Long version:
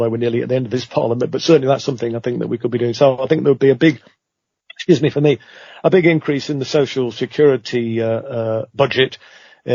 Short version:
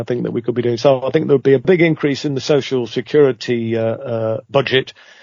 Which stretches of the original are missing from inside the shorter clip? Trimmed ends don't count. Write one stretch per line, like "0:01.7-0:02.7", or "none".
0:03.8-0:05.9